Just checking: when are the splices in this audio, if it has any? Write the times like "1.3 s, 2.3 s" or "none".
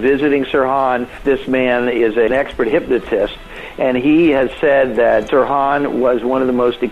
1.2 s, 2.3 s, 5.3 s